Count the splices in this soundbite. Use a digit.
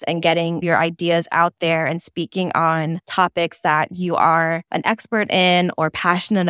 2